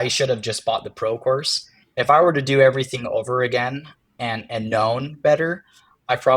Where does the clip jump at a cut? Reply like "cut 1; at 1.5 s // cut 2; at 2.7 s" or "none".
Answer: none